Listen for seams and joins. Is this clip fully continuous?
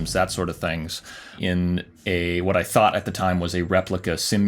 no; 1 cut; at 1.4 s

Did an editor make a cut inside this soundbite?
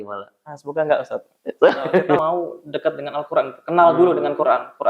yes; 1 cut; at 2.2 s

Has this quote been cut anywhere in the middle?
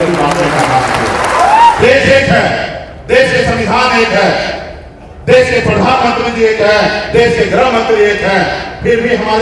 yes; 1 cut; at 1.8 s

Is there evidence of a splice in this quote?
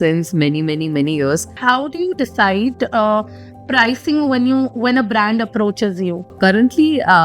yes; 2 cuts; at 1.5 s, 6.3 s

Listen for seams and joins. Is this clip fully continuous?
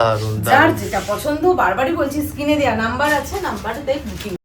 yes; 0 cuts

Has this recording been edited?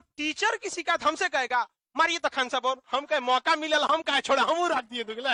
no; 0 cuts

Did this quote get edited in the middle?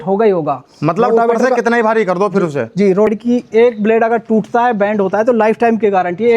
yes; 1 cut; at 3.1 s

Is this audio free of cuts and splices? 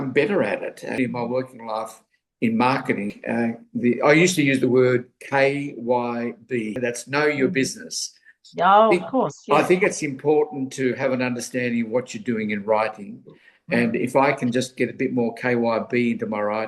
no; 2 cuts; at 0.9 s, 3.2 s

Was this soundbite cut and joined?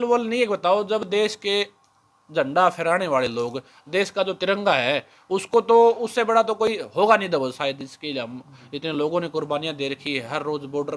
no; 0 cuts

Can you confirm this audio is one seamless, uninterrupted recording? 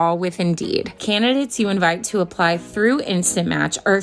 no; 1 cut; at 1.0 s

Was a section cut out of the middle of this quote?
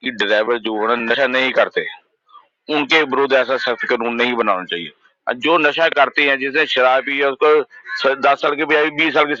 no; 0 cuts

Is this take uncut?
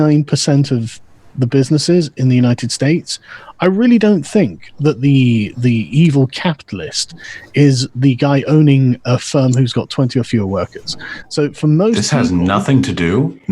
yes; 0 cuts

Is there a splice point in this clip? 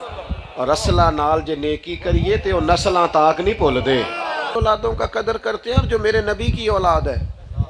yes; 1 cut; at 4.6 s

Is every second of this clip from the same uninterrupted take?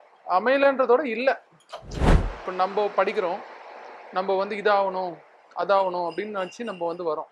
no; 1 cut; at 2.1 s

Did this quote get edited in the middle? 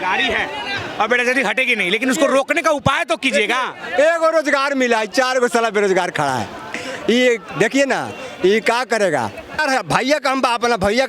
yes; 1 cut; at 9.6 s

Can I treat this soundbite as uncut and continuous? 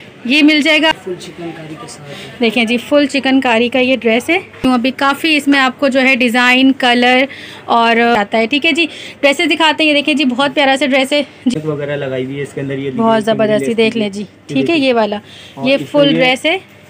no; 4 cuts; at 0.9 s, 4.6 s, 8.1 s, 11.5 s

